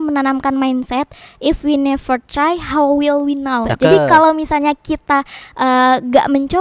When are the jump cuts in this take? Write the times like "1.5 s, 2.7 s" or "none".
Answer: 3.7 s